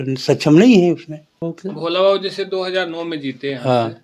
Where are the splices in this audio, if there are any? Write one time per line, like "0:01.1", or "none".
0:01.6